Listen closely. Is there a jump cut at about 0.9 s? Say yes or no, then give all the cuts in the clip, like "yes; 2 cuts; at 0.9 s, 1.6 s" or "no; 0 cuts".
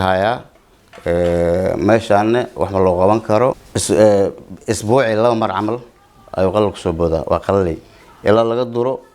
no; 1 cut; at 3.7 s